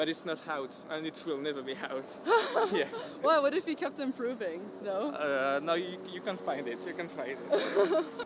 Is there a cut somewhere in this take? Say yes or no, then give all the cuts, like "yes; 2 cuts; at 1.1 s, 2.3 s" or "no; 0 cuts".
no; 0 cuts